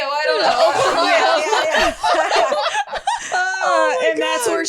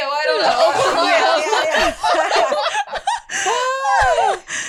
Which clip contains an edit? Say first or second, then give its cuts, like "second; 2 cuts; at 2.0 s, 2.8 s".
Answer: first; 1 cut; at 3.3 s